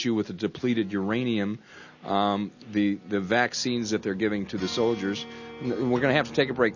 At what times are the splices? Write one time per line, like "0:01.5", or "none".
0:04.5